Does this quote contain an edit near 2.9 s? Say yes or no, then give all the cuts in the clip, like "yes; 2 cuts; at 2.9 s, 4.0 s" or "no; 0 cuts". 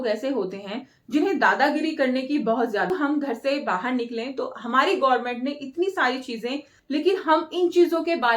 yes; 2 cuts; at 2.9 s, 6.7 s